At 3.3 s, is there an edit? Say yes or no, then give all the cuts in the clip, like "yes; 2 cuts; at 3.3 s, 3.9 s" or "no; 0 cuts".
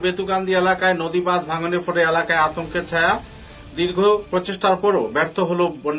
no; 0 cuts